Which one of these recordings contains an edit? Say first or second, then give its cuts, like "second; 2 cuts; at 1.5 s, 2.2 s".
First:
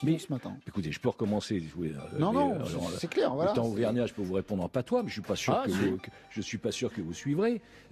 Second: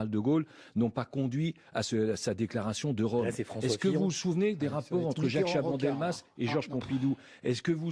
first; 1 cut; at 5.2 s